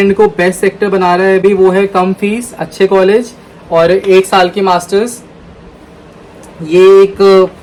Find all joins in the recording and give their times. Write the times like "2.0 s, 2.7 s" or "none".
none